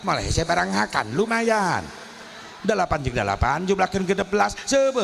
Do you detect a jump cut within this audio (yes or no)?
no